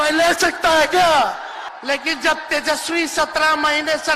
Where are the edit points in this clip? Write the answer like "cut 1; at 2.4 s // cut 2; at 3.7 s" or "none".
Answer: cut 1; at 1.6 s